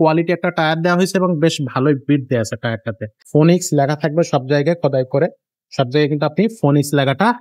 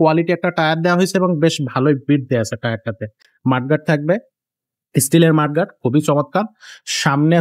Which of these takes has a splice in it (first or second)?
first